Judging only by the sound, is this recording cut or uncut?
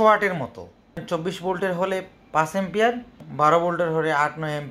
cut